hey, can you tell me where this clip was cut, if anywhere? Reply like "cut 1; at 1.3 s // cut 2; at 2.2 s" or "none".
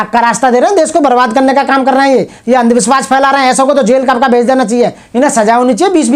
none